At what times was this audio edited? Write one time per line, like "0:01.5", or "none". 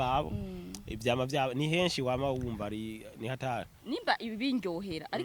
0:03.7